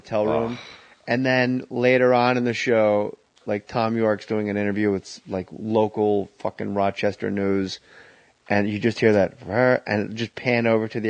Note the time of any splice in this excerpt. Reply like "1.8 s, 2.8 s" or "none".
2.2 s